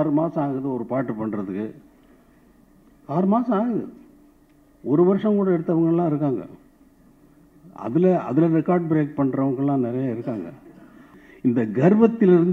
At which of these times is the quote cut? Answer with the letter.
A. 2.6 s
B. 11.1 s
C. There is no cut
B